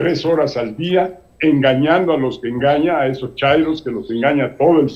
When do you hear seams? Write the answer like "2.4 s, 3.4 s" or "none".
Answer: none

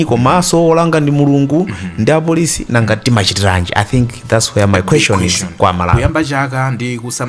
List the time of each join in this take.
6.0 s

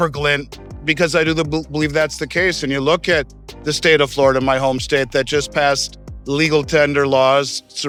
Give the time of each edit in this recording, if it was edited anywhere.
none

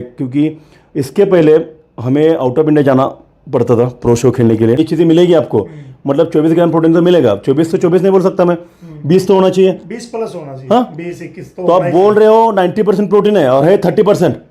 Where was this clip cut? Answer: 4.8 s

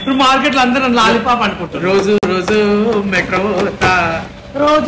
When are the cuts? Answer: none

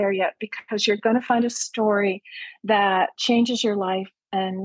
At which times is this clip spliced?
3.2 s

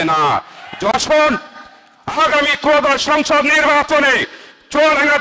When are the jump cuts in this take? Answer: 0.9 s

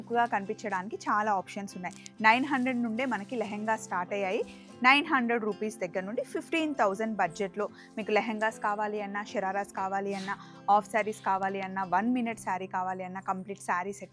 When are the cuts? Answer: none

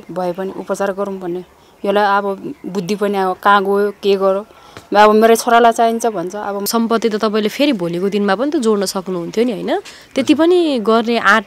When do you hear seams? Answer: 6.7 s

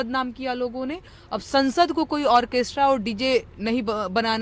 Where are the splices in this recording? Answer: none

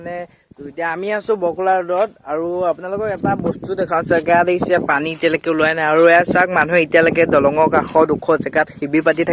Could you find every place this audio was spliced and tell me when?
none

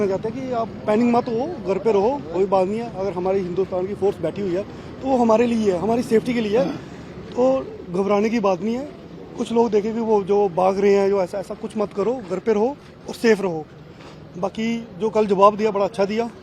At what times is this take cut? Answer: none

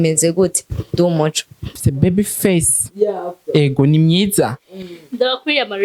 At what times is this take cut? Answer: 1.9 s

